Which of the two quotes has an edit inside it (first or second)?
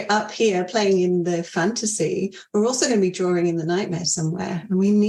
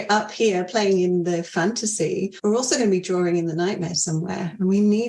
second